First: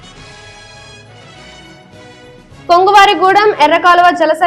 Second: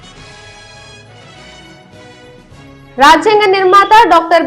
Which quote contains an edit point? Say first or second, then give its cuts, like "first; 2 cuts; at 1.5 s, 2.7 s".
second; 1 cut; at 2.6 s